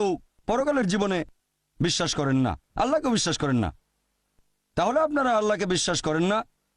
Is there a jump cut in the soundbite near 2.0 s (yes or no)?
yes